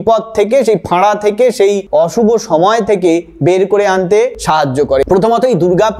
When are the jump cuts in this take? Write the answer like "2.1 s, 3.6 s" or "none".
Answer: 5.0 s